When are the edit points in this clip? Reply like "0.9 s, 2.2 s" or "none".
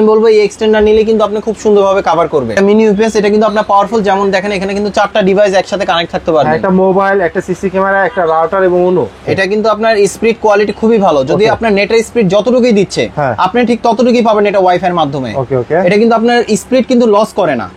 2.6 s, 9.2 s

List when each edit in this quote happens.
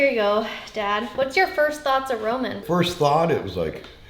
2.6 s

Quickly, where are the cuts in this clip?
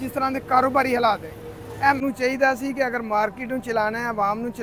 2.0 s

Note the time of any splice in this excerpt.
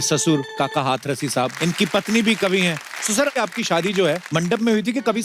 1.5 s, 3.3 s, 4.2 s

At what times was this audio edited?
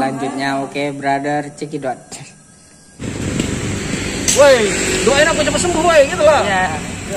3.0 s

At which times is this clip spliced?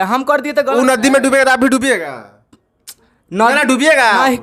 none

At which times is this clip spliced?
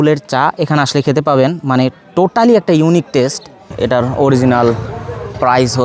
3.7 s

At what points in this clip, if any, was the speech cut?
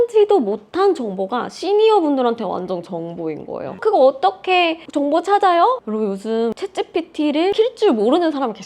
3.6 s, 6.6 s, 7.5 s

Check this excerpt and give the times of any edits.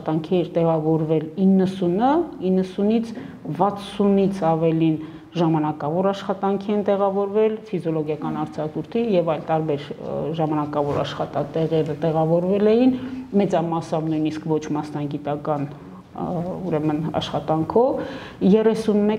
none

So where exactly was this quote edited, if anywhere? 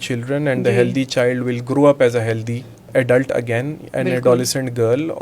2.9 s

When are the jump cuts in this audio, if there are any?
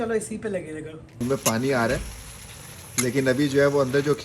1.1 s

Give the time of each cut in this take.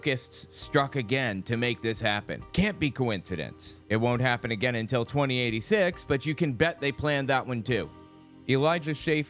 8.2 s

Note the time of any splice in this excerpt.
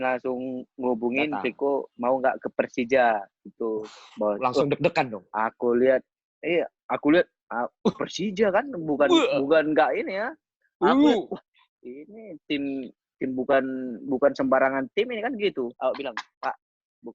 15.7 s

